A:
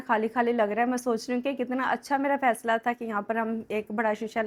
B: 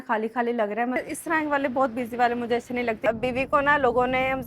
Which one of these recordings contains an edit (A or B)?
B